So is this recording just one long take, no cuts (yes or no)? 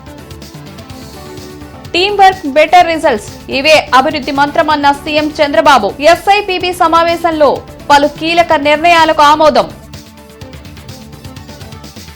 yes